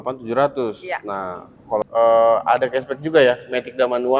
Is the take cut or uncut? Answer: cut